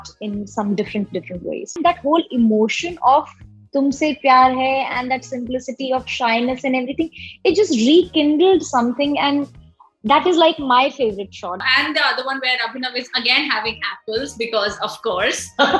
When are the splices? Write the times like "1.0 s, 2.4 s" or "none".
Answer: 1.8 s, 11.6 s